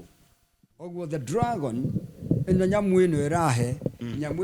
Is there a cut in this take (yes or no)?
yes